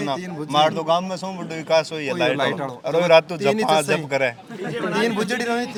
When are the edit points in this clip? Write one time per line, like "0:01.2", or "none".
none